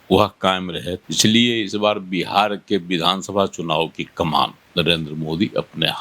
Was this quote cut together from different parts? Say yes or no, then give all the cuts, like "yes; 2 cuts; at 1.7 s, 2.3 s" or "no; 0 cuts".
yes; 2 cuts; at 1.0 s, 4.6 s